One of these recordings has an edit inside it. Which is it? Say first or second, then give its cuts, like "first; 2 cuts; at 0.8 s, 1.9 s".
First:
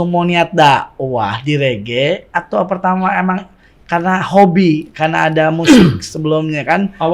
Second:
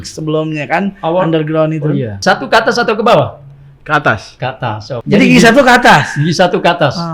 second; 2 cuts; at 2.2 s, 4.9 s